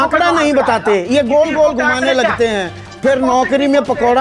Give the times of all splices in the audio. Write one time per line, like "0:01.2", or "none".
0:02.8